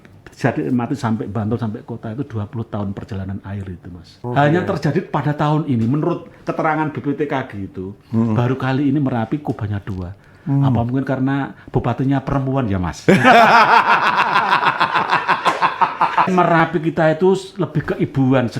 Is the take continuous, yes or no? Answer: no